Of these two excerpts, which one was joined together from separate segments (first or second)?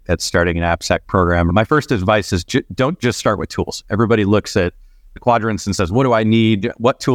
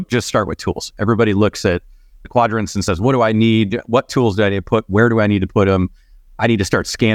first